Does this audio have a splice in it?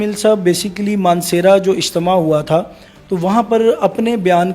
no; 0 cuts

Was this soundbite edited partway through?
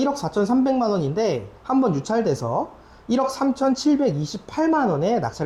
no; 0 cuts

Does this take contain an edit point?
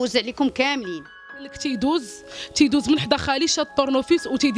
yes; 1 cut; at 1.5 s

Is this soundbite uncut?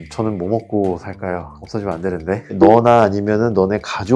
no; 1 cut; at 2.5 s

